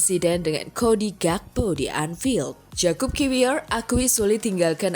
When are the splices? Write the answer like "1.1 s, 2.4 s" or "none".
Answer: 2.6 s

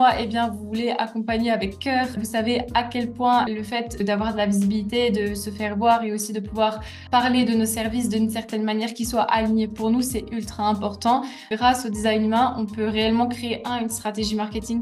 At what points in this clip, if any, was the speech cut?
4.0 s, 11.4 s

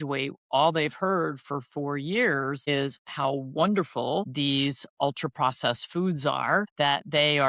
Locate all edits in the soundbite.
2.7 s, 4.3 s, 6.7 s

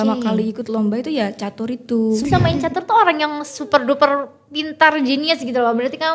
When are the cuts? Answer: 2.2 s

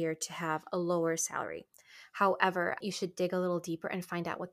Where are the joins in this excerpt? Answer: 2.8 s

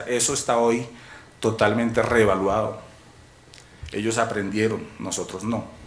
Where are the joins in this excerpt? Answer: none

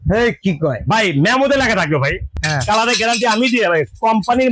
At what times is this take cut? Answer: 2.4 s

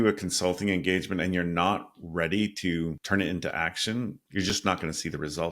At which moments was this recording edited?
3.0 s, 4.2 s

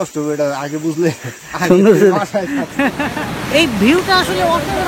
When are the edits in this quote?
3.0 s

